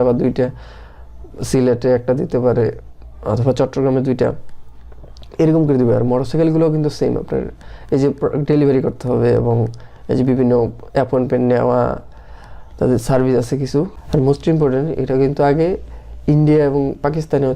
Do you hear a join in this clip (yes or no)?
yes